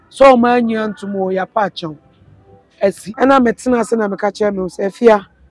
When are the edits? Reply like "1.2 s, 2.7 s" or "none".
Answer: 3.1 s